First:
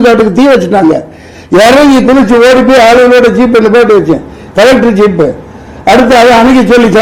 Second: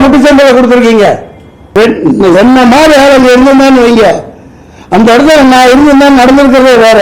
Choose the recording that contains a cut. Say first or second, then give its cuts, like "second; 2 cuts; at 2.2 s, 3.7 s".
second; 1 cut; at 1.7 s